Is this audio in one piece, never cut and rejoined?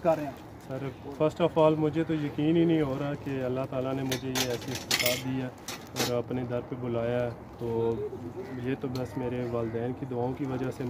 yes; 0 cuts

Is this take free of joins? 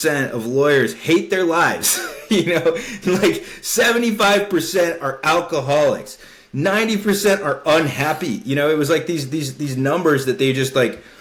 yes; 0 cuts

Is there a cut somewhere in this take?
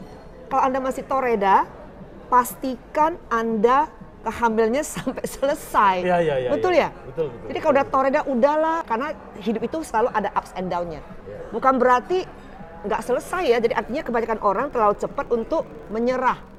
no; 0 cuts

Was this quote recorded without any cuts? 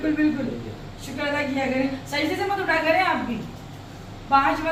yes; 0 cuts

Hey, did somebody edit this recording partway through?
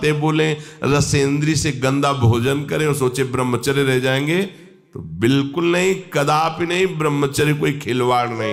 no; 0 cuts

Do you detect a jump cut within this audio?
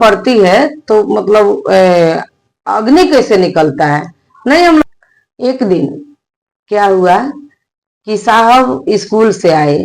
yes; 1 cut; at 4.8 s

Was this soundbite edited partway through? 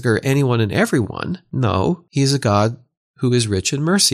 yes; 2 cuts; at 1.4 s, 2.1 s

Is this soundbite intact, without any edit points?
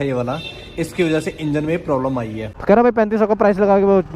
no; 1 cut; at 2.5 s

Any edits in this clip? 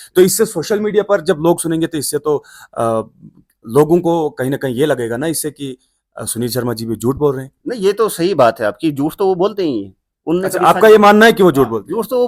no; 0 cuts

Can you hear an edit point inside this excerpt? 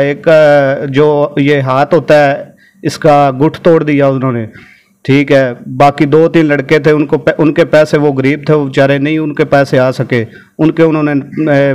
no; 0 cuts

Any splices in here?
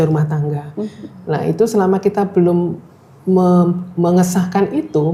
no; 0 cuts

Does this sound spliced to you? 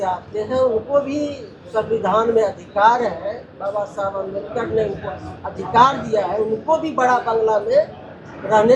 no; 0 cuts

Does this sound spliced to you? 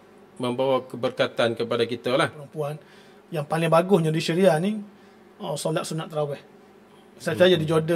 yes; 1 cut; at 2.4 s

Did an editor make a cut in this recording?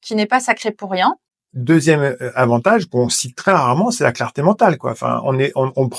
yes; 1 cut; at 1.3 s

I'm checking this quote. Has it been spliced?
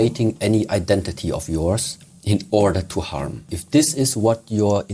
yes; 1 cut; at 3.5 s

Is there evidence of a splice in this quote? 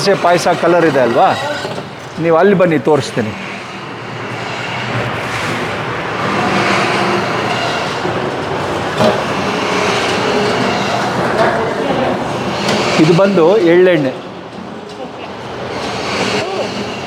no; 0 cuts

